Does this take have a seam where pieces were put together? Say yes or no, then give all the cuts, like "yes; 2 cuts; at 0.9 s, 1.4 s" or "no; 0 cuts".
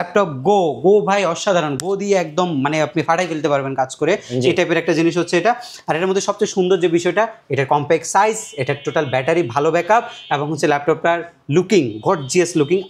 no; 0 cuts